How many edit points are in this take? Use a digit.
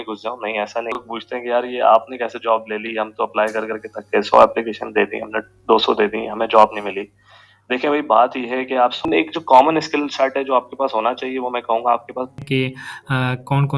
3